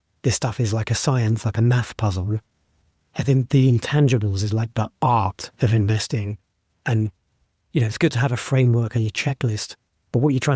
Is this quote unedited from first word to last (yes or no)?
yes